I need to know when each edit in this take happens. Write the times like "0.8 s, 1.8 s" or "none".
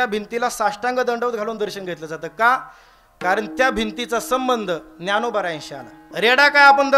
6.0 s